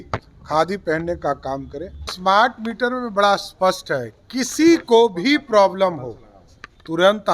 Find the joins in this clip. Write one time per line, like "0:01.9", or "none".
0:02.1